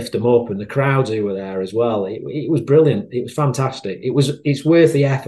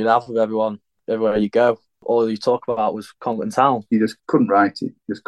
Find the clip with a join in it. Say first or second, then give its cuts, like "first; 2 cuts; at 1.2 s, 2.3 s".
second; 1 cut; at 4.1 s